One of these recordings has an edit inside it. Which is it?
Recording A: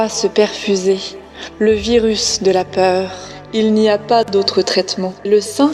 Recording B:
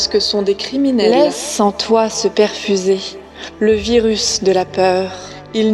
B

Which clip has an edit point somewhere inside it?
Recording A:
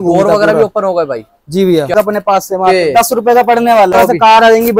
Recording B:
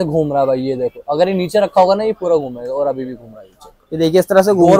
A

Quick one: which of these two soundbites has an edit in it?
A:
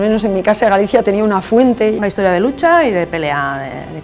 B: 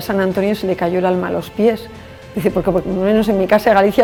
A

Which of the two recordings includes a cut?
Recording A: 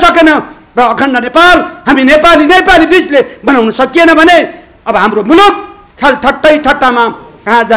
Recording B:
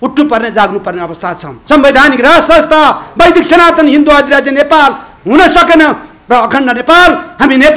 B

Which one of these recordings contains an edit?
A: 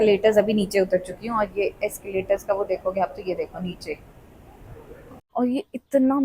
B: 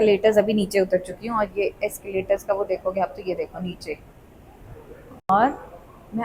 A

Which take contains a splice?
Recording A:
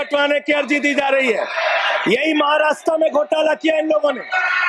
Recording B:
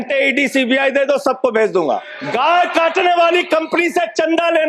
B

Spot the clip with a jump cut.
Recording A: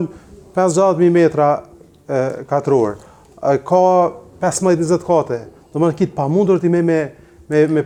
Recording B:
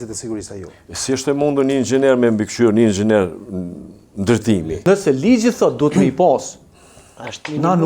B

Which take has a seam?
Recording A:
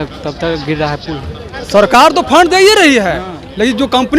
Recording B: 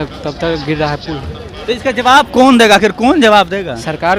A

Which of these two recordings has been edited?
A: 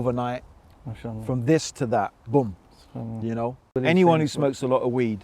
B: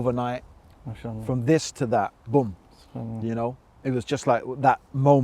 A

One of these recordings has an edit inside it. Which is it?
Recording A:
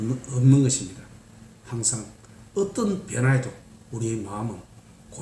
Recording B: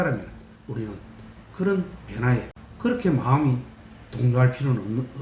B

